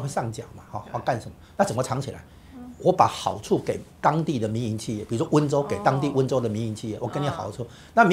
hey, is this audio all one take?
yes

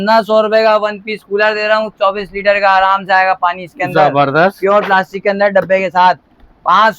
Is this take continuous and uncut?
yes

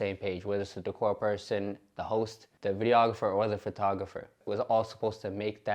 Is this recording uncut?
no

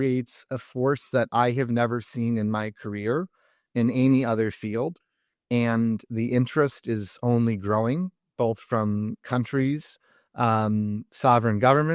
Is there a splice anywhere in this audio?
no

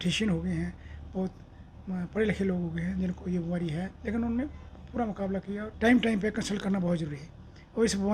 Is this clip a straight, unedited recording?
no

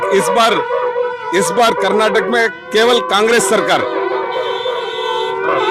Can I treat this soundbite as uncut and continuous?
yes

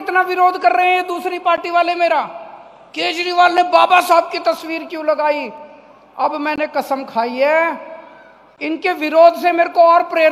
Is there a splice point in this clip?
no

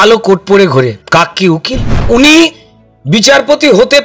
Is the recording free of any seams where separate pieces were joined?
no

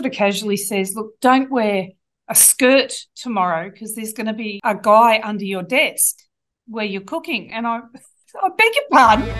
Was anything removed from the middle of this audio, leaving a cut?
yes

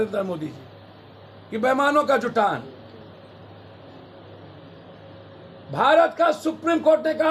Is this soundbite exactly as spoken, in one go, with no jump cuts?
yes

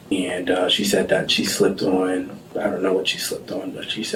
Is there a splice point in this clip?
no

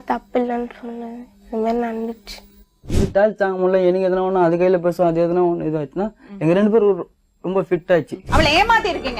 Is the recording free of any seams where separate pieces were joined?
no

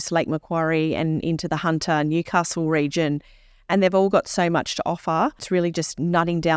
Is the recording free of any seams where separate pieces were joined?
no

